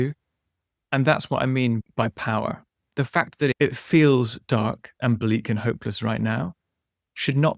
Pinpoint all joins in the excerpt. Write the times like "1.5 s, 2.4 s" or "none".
1.8 s, 2.7 s, 3.5 s